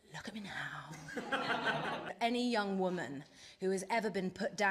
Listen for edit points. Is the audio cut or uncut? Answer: cut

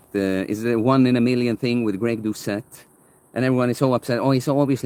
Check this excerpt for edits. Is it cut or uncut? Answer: uncut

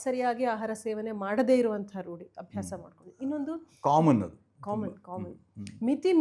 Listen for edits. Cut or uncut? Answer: uncut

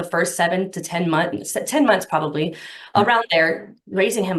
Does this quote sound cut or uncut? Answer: uncut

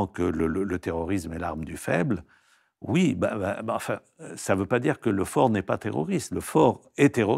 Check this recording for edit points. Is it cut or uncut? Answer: uncut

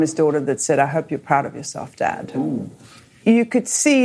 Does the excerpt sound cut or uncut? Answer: cut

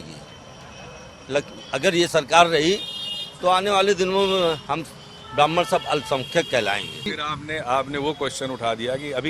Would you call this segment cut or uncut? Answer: cut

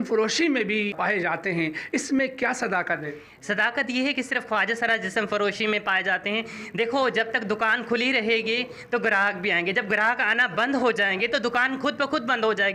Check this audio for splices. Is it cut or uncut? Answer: cut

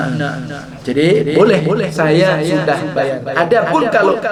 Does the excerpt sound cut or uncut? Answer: uncut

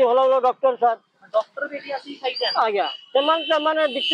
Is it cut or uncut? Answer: uncut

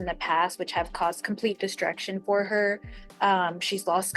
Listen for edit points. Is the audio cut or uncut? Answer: uncut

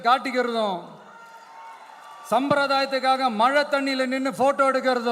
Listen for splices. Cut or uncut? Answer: uncut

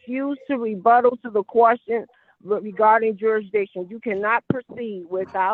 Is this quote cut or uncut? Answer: uncut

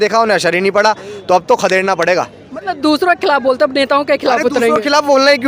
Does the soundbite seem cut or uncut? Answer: uncut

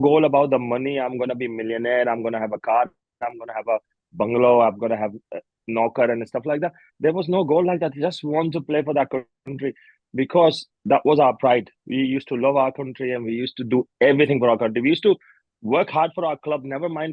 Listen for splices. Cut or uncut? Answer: uncut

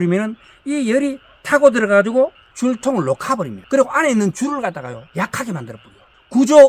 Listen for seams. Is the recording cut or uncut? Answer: cut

